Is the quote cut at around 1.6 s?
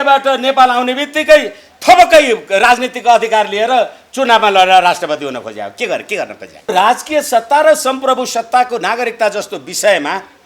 no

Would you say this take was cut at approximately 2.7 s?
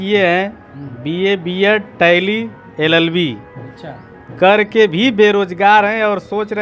no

